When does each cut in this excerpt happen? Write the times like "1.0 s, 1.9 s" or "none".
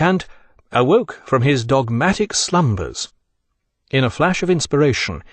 3.3 s